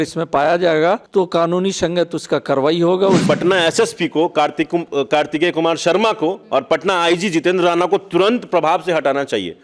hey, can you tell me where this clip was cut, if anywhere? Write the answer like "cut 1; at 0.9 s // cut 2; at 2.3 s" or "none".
cut 1; at 1.0 s // cut 2; at 3.2 s